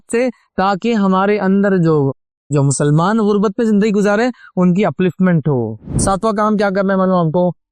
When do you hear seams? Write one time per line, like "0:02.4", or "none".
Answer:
0:06.0